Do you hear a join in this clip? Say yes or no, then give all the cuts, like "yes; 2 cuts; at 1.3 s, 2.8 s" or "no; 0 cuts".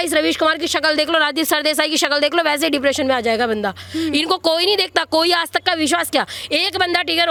no; 0 cuts